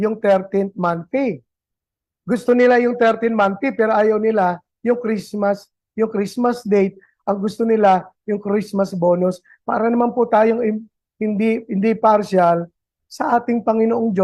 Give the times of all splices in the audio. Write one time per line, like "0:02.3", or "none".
none